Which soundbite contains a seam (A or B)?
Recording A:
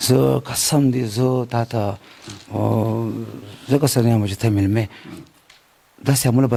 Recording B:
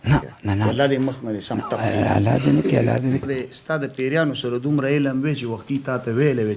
B